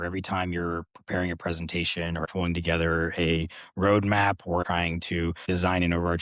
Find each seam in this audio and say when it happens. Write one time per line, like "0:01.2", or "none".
0:02.3
0:04.8